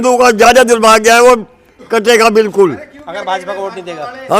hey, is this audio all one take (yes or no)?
yes